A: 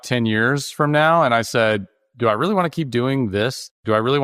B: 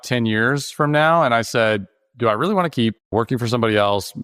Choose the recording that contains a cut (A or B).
B